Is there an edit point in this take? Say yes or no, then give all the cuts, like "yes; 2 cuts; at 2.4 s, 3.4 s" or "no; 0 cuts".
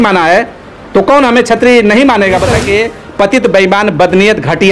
yes; 1 cut; at 2.6 s